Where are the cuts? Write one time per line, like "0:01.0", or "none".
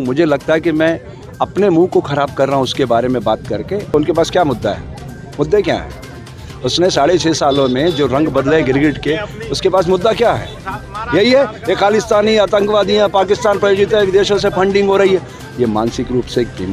0:03.9
0:15.4